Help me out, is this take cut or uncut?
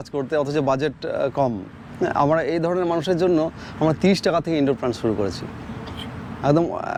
uncut